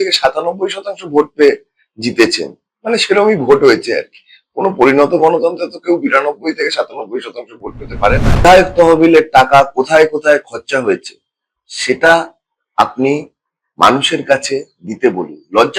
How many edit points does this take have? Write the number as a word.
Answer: one